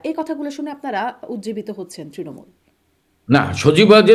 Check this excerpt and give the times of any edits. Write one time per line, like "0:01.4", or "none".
none